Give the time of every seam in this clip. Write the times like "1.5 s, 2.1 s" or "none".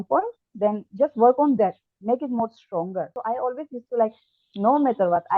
3.1 s

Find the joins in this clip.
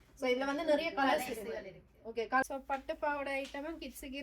2.4 s

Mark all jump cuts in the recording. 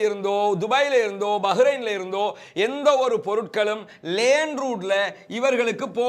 none

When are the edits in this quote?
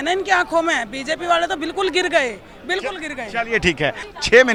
none

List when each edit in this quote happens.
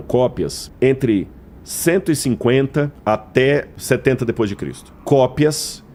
none

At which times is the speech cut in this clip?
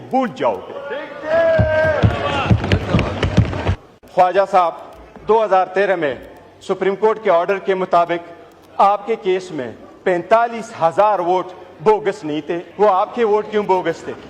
3.9 s, 12.6 s

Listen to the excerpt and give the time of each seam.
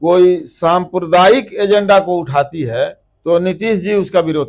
3.1 s

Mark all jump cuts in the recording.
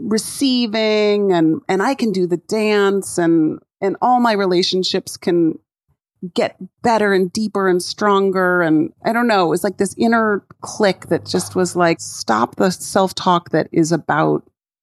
12.1 s

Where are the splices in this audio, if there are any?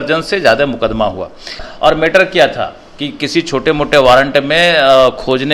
1.6 s

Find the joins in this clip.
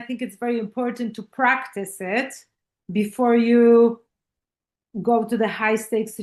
none

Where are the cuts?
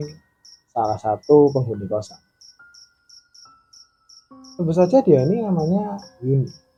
none

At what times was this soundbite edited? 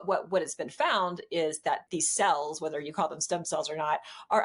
1.8 s

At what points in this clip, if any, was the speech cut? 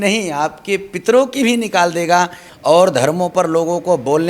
2.5 s

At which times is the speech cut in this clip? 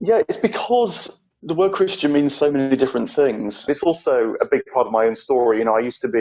3.7 s

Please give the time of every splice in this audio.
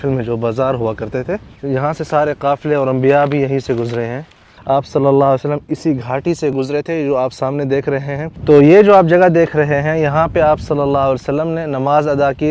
1.5 s, 4.5 s, 6.5 s, 8.3 s

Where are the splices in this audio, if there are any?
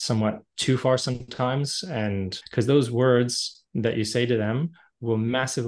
2.4 s

